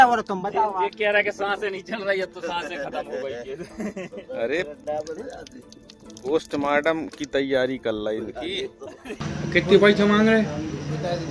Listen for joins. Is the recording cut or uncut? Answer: cut